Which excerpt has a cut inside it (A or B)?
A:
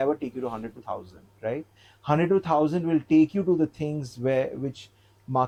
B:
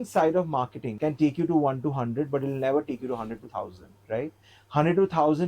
B